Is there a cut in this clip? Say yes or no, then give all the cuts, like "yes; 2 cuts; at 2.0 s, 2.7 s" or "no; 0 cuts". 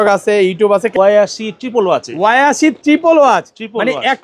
yes; 1 cut; at 0.9 s